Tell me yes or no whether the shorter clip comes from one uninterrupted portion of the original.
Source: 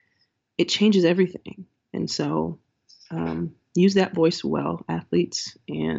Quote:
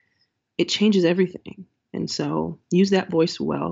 no